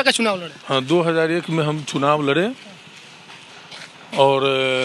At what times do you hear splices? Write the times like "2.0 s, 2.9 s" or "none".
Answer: none